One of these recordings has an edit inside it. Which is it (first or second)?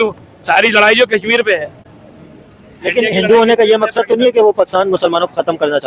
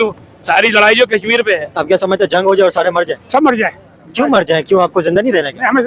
second